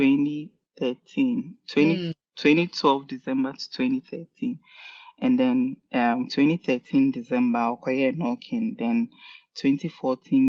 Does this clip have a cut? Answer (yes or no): no